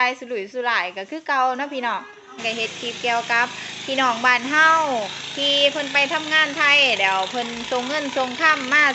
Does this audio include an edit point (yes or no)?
yes